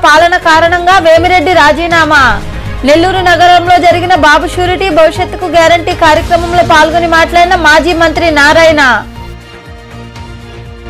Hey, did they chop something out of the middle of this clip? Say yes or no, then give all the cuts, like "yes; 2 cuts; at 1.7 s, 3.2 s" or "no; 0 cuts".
no; 0 cuts